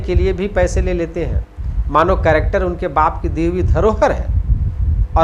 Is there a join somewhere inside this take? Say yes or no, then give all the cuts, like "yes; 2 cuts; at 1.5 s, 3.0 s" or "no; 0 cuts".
no; 0 cuts